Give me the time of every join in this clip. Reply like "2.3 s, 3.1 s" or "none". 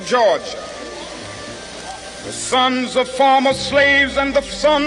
1.0 s